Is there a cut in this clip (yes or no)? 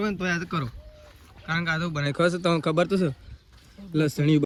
no